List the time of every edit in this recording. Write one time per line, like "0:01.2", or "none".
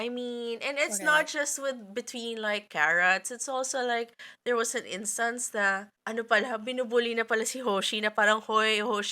0:05.9